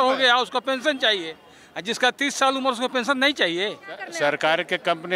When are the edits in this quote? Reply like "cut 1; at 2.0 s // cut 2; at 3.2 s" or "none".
cut 1; at 4.1 s